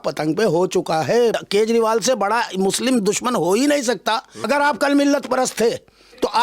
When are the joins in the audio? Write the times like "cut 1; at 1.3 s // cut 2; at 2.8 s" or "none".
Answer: cut 1; at 1.4 s // cut 2; at 4.4 s